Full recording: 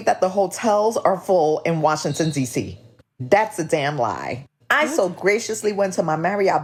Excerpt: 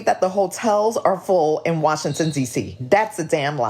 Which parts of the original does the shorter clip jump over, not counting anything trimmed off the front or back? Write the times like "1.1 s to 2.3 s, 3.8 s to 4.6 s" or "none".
2.7 s to 3.1 s